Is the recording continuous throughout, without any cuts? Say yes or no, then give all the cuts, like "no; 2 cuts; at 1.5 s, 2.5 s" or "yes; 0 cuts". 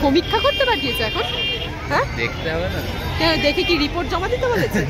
yes; 0 cuts